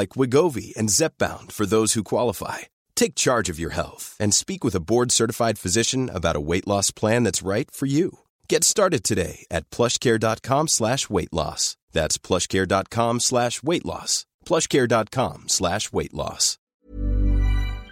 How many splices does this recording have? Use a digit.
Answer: 1